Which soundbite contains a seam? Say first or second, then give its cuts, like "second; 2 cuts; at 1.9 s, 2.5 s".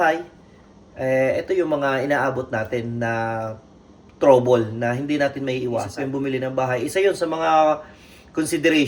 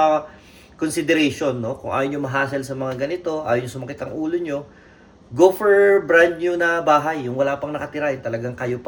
first; 1 cut; at 5.9 s